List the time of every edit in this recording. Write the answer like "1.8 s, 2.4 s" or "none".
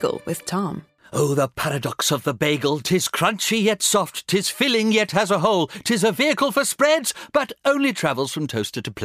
none

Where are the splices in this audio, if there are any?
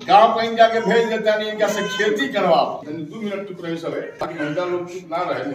2.8 s

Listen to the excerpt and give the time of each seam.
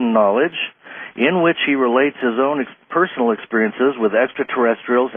2.7 s

